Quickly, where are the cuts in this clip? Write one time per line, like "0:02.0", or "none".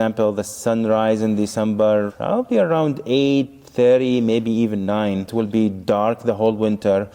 0:05.3